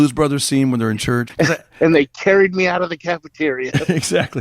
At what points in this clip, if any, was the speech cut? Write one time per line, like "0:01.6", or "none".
0:01.3